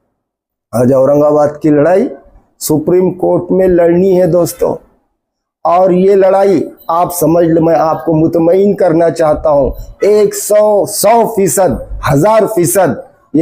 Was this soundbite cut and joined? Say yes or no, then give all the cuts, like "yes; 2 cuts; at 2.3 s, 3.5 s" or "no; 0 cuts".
no; 0 cuts